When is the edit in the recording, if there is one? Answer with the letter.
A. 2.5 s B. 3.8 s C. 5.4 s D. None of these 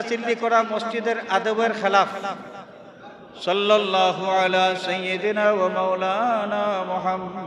A